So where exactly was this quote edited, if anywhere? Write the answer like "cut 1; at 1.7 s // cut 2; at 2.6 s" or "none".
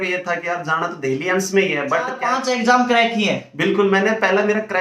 cut 1; at 2.3 s